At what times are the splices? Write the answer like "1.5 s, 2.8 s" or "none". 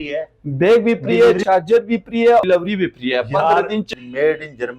1.4 s, 2.4 s, 3.9 s

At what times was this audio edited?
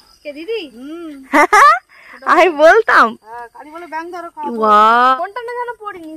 5.2 s

